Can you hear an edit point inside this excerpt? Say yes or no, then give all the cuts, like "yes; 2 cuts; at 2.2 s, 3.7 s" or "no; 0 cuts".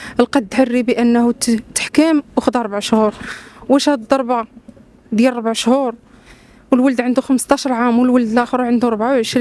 no; 0 cuts